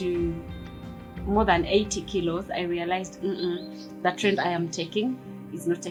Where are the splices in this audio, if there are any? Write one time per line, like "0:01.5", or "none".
none